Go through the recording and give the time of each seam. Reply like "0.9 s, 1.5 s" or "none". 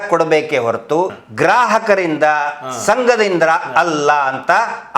1.2 s